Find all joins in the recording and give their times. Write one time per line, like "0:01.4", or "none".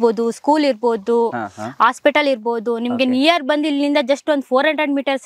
none